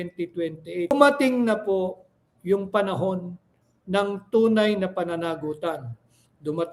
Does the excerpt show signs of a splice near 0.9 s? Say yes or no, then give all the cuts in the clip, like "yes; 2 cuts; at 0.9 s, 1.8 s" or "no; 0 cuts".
yes; 1 cut; at 0.9 s